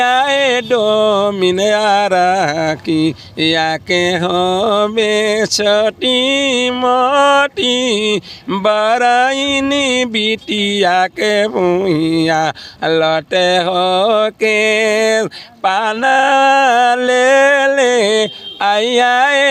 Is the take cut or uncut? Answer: uncut